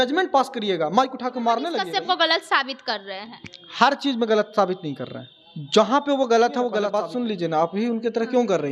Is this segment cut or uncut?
cut